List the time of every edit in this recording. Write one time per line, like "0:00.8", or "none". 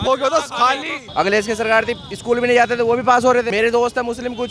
0:01.0
0:03.5